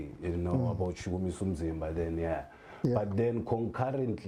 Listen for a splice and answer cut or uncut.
uncut